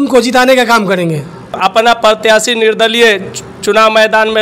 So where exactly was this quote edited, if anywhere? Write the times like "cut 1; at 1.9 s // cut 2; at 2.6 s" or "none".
cut 1; at 1.6 s